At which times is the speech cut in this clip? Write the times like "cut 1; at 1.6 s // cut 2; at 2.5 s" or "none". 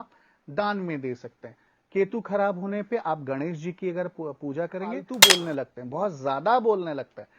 cut 1; at 5.1 s